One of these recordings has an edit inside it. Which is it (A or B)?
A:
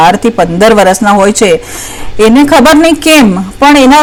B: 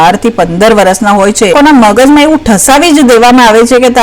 B